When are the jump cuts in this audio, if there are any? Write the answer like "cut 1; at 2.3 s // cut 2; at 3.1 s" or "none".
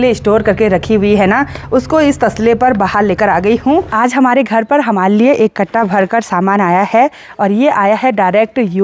cut 1; at 3.9 s